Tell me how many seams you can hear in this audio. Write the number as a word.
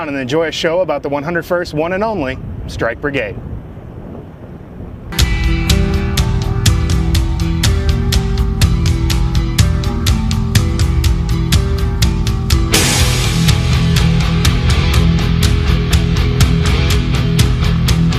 one